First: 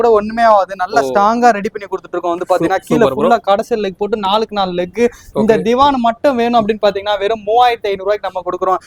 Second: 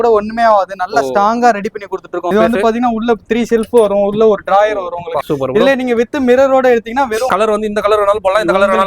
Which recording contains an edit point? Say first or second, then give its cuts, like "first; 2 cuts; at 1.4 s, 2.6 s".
second; 3 cuts; at 2.3 s, 5.2 s, 7.3 s